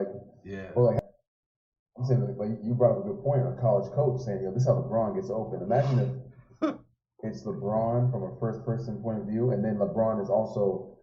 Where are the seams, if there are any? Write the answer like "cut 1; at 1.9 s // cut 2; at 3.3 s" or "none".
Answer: cut 1; at 1.0 s